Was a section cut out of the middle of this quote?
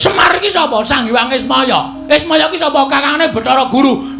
no; 0 cuts

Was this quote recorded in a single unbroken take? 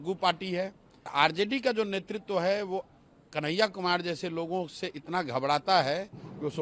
no; 1 cut; at 1.1 s

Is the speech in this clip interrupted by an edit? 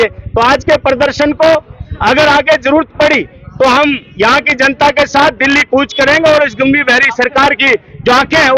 no; 0 cuts

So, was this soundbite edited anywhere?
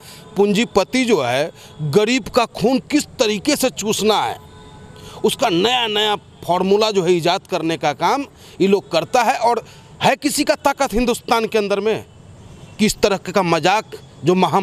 no; 0 cuts

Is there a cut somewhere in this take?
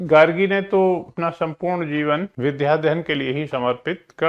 yes; 2 cuts; at 1.1 s, 2.3 s

